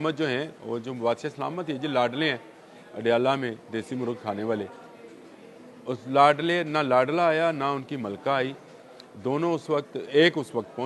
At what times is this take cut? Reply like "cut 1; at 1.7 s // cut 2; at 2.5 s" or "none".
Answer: none